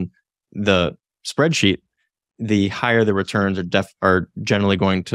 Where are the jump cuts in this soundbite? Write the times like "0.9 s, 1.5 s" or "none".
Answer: none